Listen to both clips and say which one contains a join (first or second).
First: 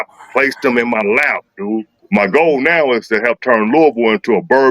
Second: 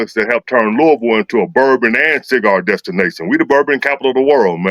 first